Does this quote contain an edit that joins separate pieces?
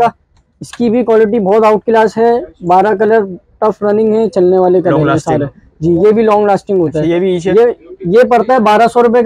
no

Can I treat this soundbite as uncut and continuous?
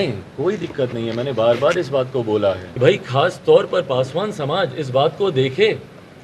no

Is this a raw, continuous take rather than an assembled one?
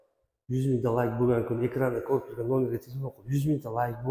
yes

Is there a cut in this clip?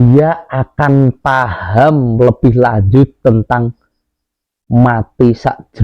no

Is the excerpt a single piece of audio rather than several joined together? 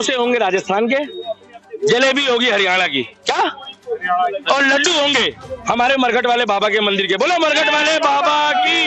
yes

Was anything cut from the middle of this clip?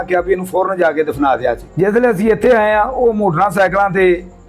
no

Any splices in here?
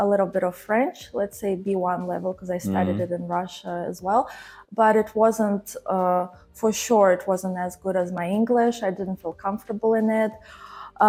no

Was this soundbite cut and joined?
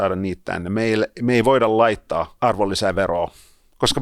yes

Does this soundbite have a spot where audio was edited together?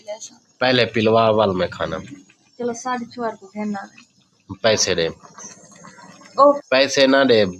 yes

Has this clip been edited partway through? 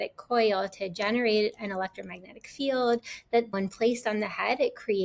yes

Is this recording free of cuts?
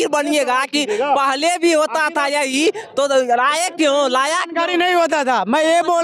yes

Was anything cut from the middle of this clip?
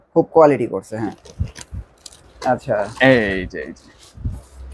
yes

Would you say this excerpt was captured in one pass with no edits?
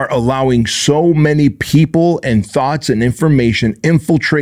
yes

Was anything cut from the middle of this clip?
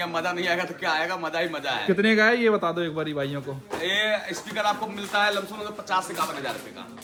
no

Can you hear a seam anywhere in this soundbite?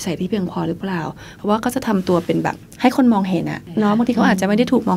yes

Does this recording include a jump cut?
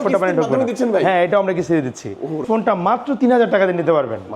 yes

